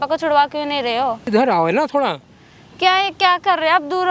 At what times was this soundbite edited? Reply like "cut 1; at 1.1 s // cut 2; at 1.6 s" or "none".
cut 1; at 1.3 s